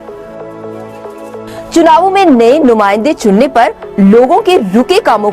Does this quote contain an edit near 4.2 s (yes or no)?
yes